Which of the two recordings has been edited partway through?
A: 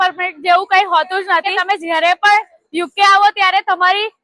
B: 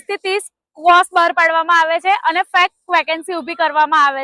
A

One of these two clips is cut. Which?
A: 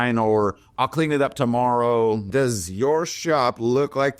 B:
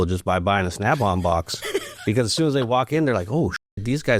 A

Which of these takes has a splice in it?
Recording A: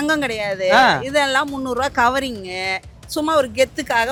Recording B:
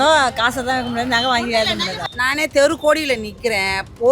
B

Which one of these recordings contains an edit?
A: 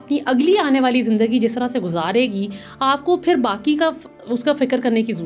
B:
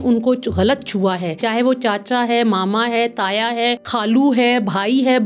B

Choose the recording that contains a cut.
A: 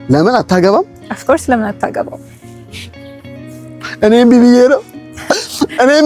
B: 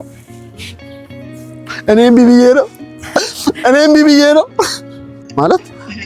B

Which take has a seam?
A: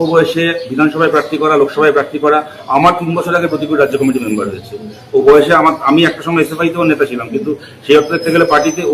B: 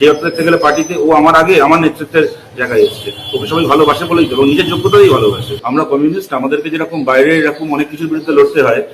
B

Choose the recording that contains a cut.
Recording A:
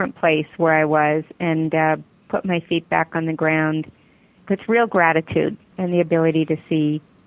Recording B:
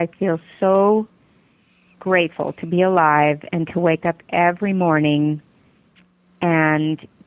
A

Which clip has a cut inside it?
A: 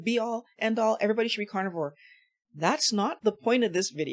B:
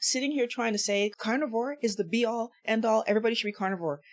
B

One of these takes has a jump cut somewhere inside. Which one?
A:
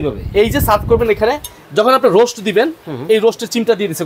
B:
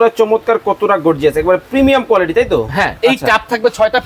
B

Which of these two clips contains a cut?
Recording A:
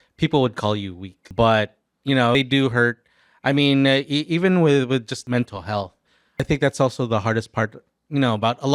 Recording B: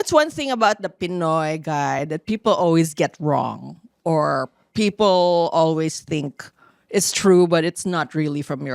A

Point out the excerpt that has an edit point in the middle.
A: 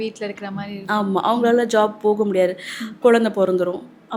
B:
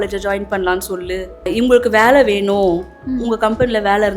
B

